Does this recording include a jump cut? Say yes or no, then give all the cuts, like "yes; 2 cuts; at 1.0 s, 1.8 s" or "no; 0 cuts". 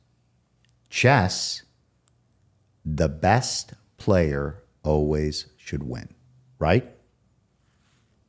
no; 0 cuts